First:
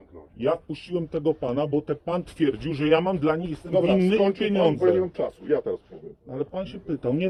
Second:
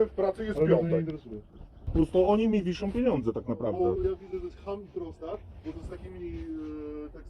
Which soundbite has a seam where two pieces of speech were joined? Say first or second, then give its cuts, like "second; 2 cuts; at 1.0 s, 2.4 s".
second; 1 cut; at 1.9 s